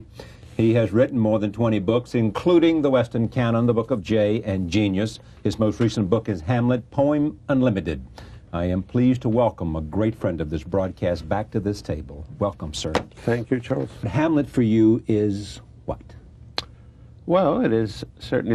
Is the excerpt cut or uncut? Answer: uncut